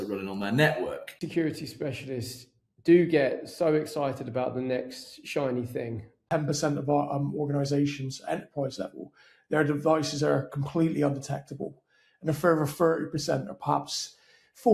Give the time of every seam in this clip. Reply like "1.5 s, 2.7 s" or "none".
1.1 s, 6.2 s

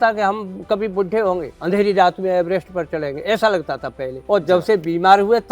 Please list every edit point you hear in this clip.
1.5 s, 4.1 s

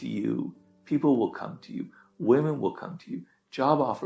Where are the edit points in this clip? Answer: none

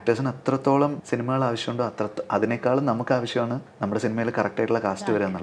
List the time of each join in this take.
1.0 s, 3.7 s

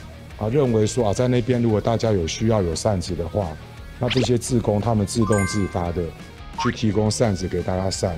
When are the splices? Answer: none

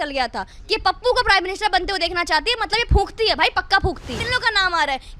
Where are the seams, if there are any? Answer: 4.2 s

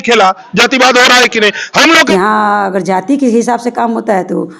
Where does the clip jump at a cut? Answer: 2.1 s

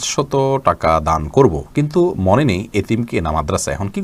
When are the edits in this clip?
none

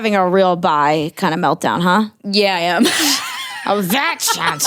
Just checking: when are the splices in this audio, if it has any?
none

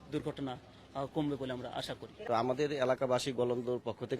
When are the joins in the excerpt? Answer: 2.1 s

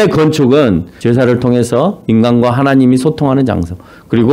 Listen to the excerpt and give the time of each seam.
0.9 s

